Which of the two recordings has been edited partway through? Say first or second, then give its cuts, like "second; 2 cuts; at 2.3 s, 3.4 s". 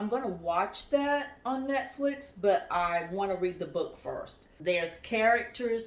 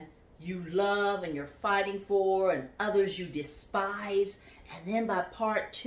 first; 1 cut; at 4.5 s